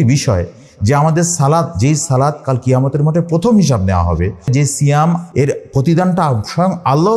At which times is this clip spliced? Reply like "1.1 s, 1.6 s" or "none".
4.5 s, 5.3 s